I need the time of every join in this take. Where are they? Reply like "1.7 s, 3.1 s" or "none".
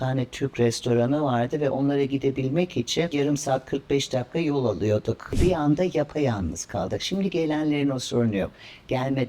3.1 s, 5.3 s

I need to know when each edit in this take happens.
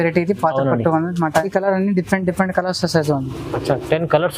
1.5 s

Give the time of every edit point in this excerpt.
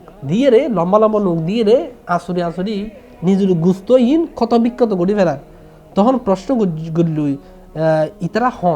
none

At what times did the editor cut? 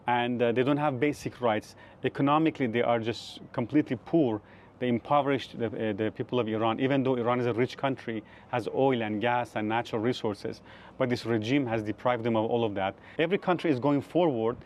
13.0 s

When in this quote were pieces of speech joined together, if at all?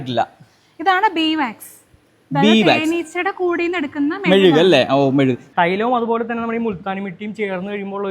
5.4 s

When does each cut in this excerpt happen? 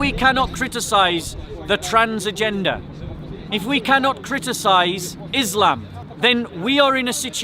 5.9 s

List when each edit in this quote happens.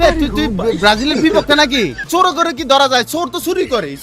2.0 s

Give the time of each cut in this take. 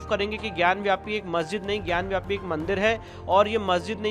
none

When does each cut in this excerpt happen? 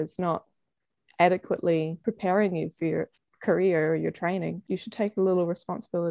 1.9 s, 3.2 s, 4.6 s

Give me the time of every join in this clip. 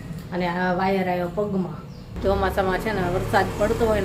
2.1 s

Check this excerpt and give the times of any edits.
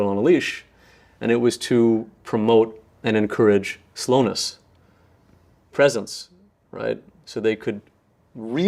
none

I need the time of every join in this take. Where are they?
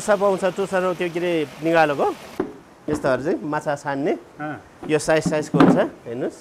2.3 s

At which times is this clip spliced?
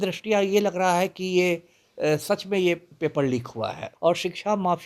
3.8 s

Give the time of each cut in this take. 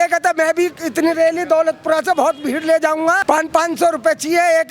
3.2 s

